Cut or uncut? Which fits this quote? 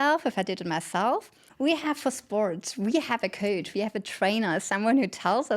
cut